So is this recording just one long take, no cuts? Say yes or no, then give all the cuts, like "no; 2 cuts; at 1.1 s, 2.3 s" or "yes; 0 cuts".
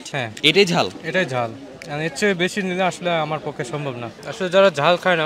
yes; 0 cuts